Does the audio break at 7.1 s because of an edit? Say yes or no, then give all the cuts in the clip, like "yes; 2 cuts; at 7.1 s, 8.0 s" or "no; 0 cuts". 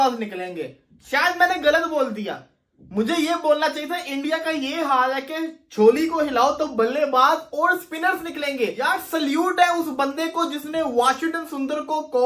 no; 1 cut; at 8.9 s